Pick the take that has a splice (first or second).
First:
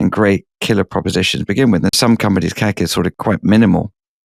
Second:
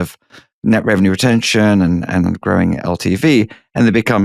first